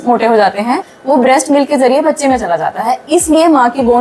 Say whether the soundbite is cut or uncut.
cut